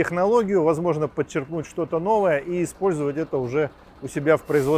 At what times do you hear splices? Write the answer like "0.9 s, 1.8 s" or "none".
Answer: none